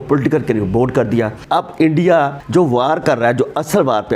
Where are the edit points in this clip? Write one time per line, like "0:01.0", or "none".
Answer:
0:01.4
0:02.4